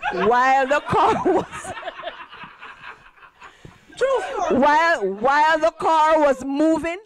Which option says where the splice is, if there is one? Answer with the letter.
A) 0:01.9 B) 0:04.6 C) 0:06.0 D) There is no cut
D